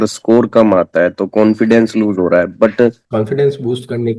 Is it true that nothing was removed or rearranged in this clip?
no; 1 cut; at 3.0 s

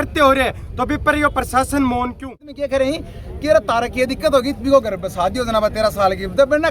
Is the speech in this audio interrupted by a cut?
yes; 1 cut; at 2.5 s

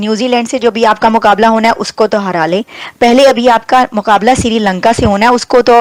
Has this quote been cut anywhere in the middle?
no; 0 cuts

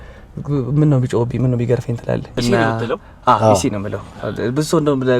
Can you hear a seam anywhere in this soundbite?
yes; 1 cut; at 2.3 s

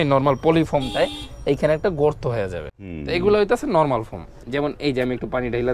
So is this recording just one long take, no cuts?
no; 1 cut; at 4.4 s

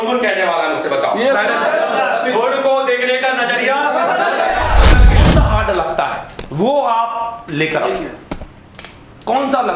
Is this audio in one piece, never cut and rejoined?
no; 1 cut; at 5.1 s

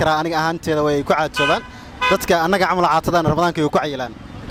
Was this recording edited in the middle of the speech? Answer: no; 0 cuts

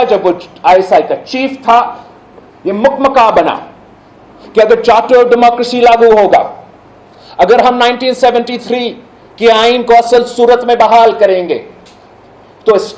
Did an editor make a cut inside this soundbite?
no; 0 cuts

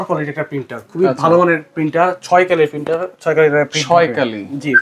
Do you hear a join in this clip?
no; 0 cuts

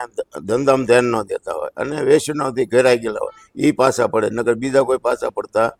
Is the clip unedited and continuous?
yes; 0 cuts

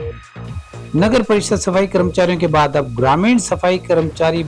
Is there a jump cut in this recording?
yes; 1 cut; at 0.9 s

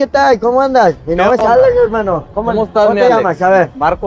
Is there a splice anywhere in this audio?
no; 0 cuts

